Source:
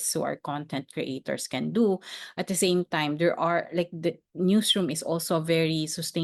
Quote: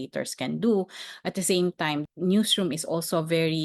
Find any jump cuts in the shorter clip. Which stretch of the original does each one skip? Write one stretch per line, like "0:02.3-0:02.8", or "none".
0:03.1-0:04.2